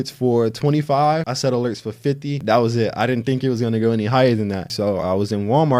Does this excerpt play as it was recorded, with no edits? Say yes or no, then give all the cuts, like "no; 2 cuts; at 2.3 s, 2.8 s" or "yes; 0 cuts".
no; 3 cuts; at 1.3 s, 2.4 s, 4.7 s